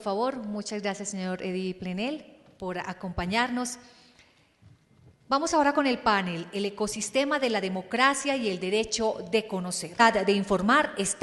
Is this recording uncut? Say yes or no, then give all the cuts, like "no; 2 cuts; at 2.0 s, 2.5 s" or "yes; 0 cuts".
yes; 0 cuts